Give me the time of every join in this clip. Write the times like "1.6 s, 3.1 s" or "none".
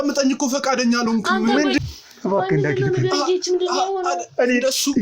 1.8 s